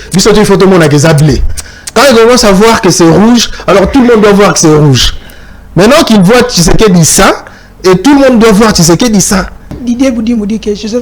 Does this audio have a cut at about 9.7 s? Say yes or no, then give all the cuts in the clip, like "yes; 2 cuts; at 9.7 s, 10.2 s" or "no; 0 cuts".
yes; 1 cut; at 9.7 s